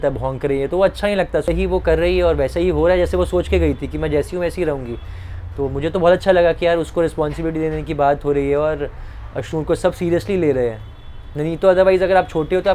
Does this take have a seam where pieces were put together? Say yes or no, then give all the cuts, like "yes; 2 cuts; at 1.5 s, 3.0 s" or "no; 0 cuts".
yes; 1 cut; at 1.4 s